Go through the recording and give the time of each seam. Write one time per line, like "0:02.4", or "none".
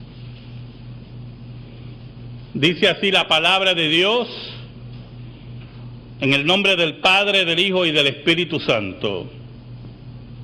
0:03.0